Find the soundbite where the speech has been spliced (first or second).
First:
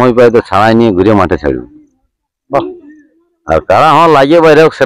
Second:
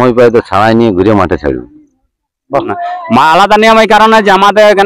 second